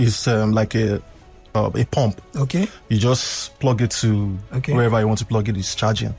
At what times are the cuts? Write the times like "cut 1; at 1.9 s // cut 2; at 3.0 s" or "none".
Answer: cut 1; at 1.6 s